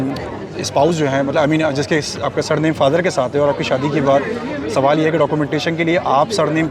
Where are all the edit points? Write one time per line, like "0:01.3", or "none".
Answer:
none